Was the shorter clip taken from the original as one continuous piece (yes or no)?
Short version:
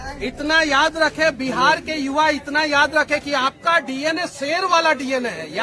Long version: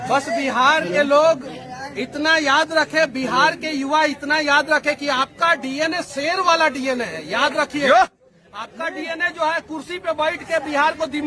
yes